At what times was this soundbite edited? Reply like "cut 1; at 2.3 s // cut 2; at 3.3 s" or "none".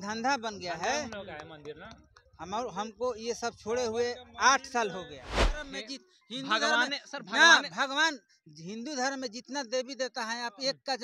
cut 1; at 5.7 s